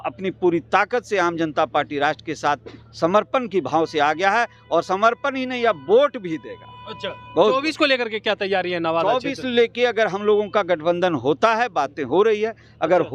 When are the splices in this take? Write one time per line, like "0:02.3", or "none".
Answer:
none

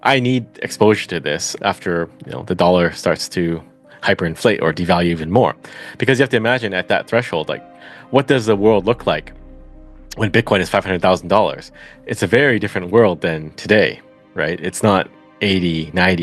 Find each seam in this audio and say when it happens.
0:01.5

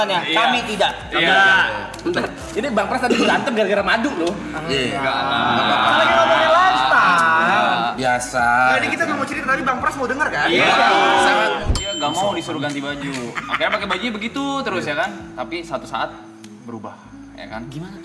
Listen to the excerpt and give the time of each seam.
0:11.6

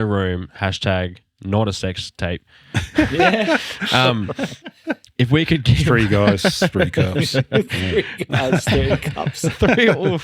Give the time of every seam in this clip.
none

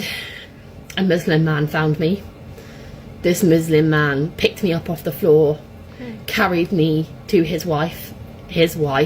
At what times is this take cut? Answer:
none

